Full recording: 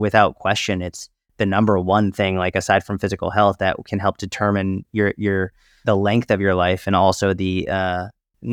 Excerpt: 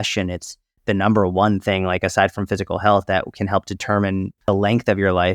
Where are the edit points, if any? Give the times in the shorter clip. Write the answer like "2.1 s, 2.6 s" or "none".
4.3 s